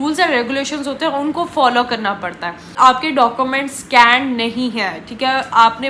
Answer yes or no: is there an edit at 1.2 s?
no